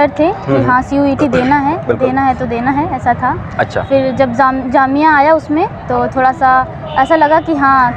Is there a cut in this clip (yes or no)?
no